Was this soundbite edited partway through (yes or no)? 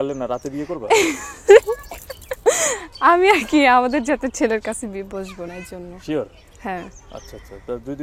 no